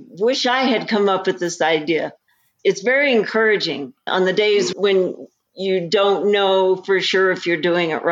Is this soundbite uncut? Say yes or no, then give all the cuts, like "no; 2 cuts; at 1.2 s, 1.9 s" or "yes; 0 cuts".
no; 1 cut; at 3.9 s